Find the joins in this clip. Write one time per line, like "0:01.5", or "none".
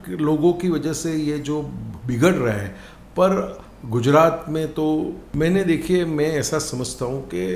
0:05.2